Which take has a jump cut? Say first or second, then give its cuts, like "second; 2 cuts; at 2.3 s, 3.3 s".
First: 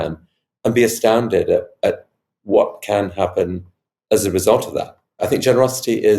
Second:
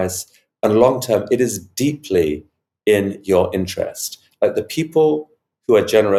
first; 1 cut; at 5.2 s